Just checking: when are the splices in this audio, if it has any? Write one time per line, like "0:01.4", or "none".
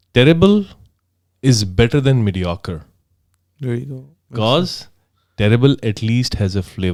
none